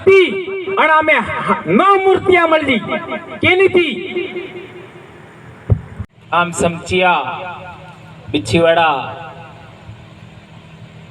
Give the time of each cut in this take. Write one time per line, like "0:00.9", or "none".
0:06.1